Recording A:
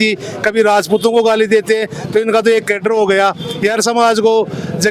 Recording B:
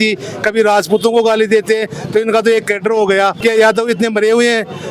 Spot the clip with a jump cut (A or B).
B